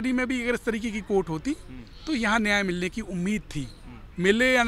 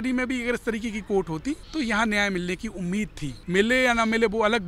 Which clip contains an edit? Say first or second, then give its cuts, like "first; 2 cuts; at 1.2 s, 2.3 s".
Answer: second; 2 cuts; at 1.6 s, 3.3 s